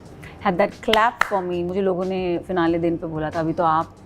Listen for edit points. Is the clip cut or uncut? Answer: cut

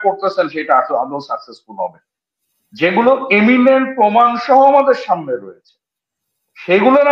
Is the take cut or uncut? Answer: uncut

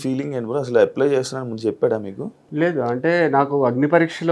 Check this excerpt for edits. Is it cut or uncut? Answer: uncut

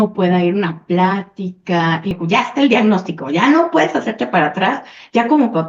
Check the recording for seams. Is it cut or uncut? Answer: cut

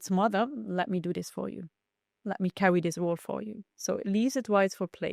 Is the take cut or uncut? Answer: uncut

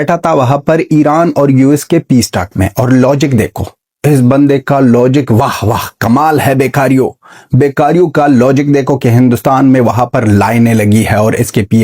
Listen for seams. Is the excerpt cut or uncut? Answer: uncut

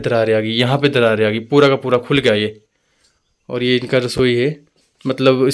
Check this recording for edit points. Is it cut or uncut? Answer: uncut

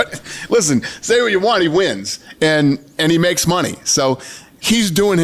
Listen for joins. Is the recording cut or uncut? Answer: uncut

